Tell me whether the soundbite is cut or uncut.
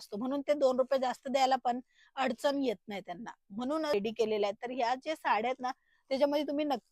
cut